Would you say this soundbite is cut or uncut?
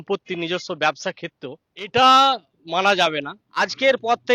cut